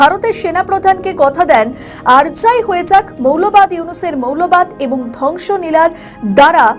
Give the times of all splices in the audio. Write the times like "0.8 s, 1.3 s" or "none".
none